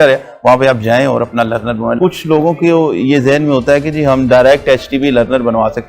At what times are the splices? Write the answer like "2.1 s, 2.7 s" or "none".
2.0 s

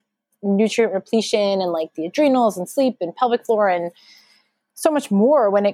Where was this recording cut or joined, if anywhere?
none

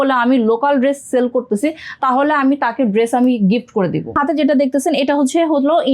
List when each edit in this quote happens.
4.1 s

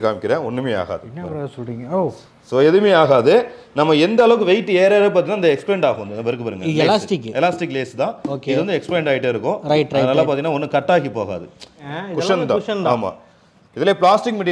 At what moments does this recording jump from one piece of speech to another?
11.8 s

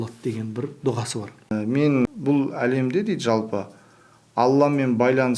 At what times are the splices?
1.5 s, 2.1 s

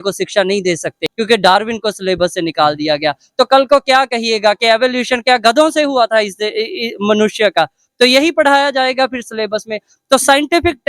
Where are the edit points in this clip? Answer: 1.0 s

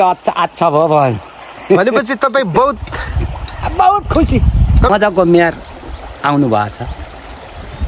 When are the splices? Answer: 4.9 s

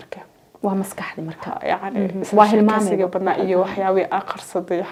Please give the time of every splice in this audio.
none

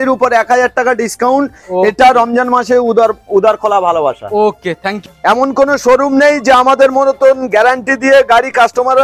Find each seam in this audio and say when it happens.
4.9 s

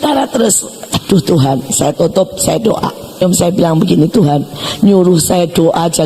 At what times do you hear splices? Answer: 0.9 s, 3.2 s

